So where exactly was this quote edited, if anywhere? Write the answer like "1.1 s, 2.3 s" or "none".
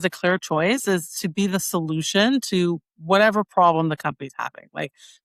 none